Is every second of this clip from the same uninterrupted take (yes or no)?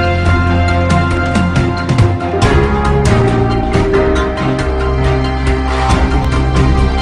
yes